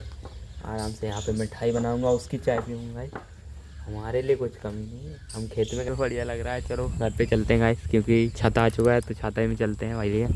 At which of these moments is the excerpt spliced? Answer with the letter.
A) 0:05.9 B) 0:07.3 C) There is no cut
A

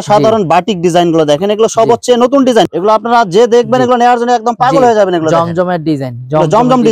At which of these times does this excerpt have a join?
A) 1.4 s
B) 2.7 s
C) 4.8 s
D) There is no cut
B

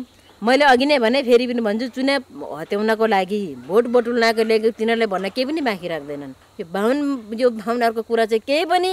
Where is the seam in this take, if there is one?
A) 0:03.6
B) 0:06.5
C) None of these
B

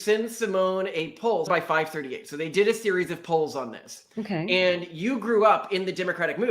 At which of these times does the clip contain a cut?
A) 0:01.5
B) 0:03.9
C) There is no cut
A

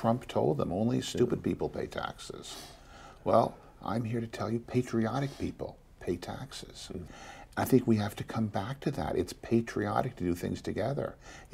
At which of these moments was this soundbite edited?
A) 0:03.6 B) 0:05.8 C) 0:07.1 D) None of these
C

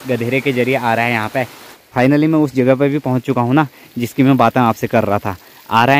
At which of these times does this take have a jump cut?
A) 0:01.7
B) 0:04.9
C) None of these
A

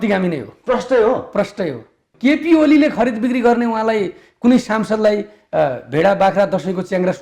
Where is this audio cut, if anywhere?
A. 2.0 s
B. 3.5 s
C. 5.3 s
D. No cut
A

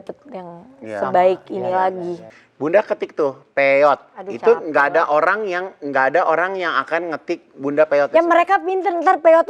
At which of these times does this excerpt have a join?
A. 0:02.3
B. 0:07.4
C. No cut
A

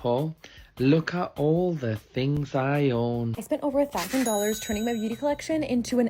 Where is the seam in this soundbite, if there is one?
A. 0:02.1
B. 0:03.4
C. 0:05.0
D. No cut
B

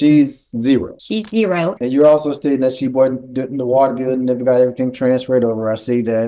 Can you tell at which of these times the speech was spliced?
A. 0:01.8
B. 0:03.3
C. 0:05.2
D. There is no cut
A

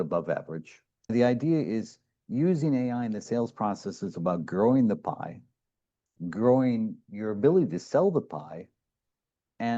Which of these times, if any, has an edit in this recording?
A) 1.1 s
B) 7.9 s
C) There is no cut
A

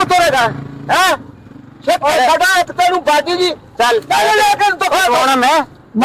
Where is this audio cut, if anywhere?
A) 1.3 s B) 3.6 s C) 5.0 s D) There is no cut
D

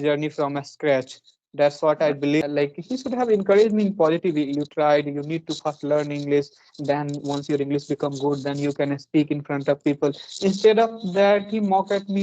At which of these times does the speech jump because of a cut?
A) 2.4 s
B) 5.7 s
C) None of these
A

